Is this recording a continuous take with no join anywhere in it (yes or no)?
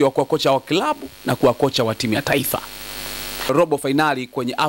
no